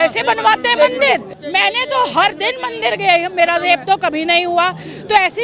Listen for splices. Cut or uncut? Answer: cut